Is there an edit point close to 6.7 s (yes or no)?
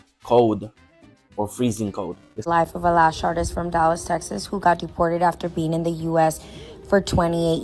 no